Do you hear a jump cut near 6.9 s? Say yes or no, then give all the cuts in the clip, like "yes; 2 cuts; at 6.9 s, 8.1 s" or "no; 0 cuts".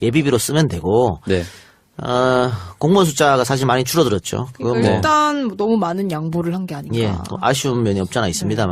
no; 1 cut; at 5.2 s